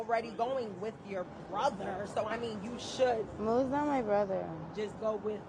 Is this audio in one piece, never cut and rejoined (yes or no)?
no